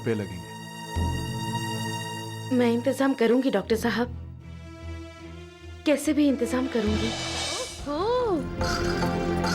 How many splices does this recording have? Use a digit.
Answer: 1